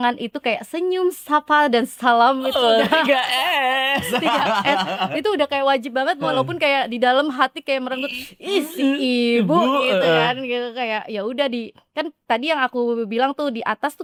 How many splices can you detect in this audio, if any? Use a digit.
0